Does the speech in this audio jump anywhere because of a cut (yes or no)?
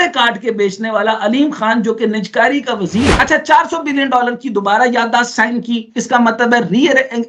yes